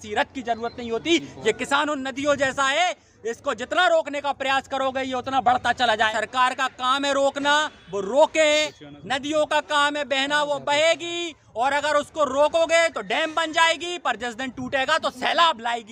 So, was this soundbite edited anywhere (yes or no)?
yes